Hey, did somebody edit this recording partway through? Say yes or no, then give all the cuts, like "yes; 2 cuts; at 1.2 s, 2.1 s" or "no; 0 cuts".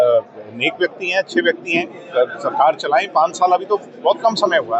no; 0 cuts